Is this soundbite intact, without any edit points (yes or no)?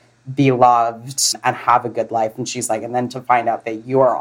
no